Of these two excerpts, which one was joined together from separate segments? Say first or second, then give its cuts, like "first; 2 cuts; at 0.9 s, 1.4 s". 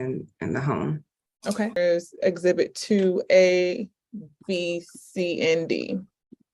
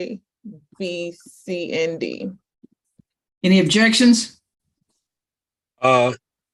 first; 1 cut; at 1.8 s